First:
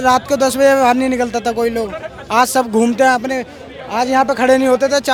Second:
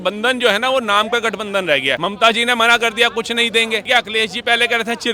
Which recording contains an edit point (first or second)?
second